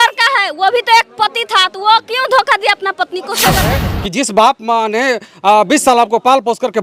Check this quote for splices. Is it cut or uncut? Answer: cut